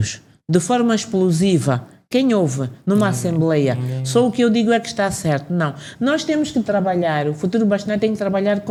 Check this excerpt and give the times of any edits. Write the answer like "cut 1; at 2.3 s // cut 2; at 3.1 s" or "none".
none

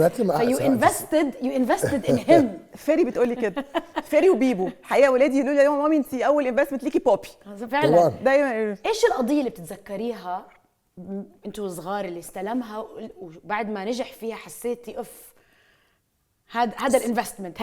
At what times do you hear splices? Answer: none

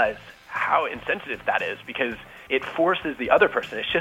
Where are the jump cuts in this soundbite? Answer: cut 1; at 1.4 s // cut 2; at 2.3 s

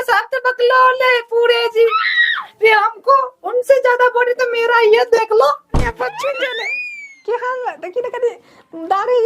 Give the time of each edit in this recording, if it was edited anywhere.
cut 1; at 5.7 s

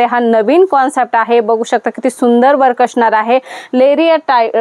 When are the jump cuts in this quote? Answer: none

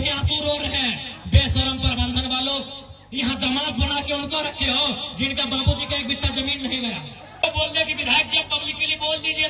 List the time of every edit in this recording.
cut 1; at 7.4 s

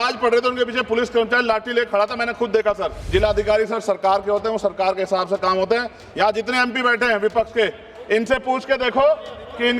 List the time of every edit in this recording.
cut 1; at 2.9 s

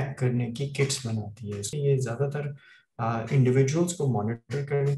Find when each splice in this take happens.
cut 1; at 1.7 s

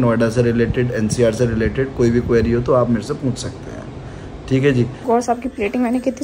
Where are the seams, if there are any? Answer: cut 1; at 5.0 s

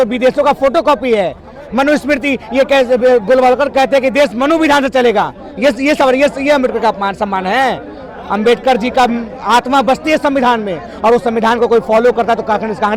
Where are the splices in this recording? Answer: none

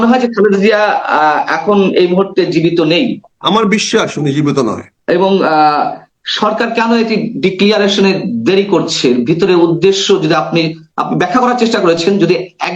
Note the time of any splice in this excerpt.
cut 1; at 3.3 s // cut 2; at 4.9 s

